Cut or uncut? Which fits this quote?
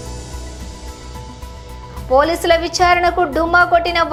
uncut